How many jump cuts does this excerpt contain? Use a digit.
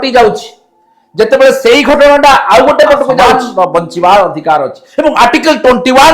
1